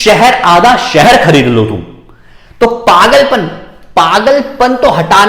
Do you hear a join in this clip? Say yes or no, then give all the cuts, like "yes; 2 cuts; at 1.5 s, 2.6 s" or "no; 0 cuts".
no; 0 cuts